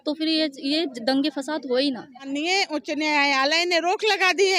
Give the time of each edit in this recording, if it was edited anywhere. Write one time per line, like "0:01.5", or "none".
0:02.2